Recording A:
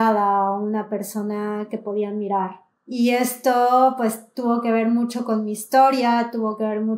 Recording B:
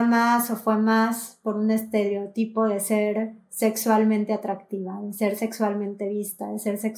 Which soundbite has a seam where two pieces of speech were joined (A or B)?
A